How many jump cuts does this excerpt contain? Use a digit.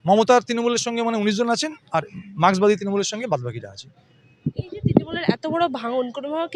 0